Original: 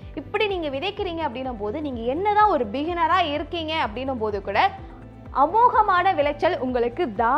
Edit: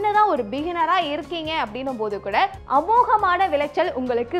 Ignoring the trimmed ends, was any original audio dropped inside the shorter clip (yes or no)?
yes